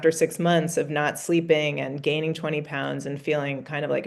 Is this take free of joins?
yes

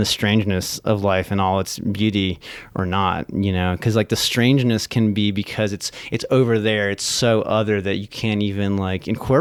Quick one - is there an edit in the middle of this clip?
no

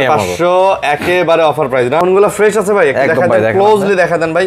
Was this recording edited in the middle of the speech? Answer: yes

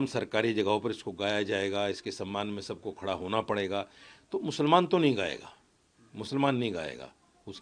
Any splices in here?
no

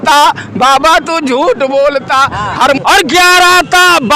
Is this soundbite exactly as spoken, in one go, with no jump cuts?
no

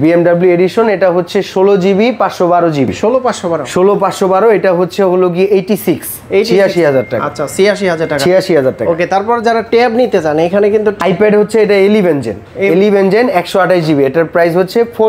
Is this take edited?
no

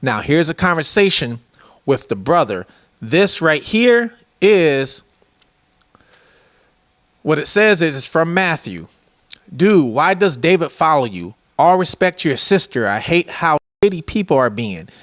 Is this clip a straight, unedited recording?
yes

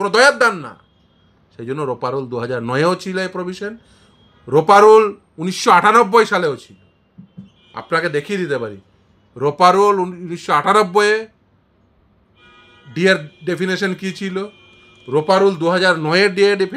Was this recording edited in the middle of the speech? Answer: no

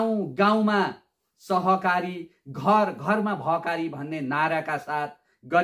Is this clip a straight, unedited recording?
yes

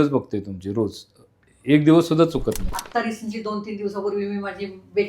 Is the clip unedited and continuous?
no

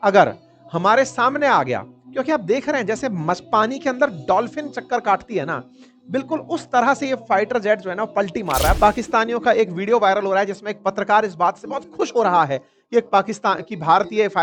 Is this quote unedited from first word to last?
no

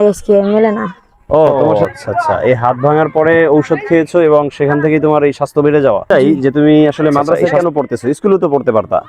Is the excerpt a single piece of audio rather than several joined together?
no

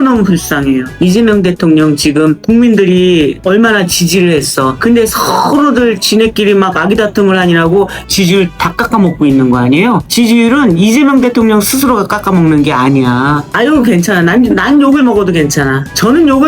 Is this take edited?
yes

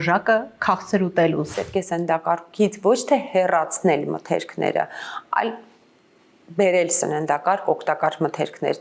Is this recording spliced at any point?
yes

